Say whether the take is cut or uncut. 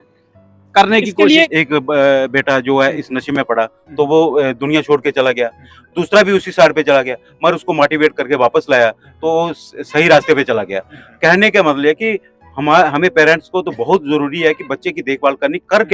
cut